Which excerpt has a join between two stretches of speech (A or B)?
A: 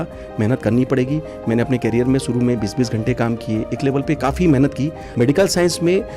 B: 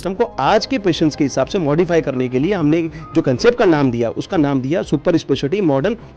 A